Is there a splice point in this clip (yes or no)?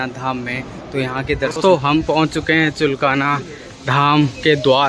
yes